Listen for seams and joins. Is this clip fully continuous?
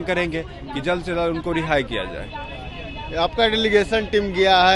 yes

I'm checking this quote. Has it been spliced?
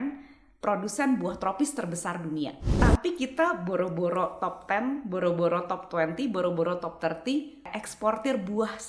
yes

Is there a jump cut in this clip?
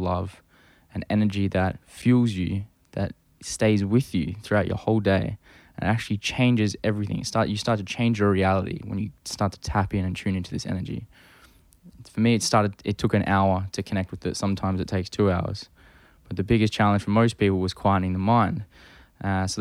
yes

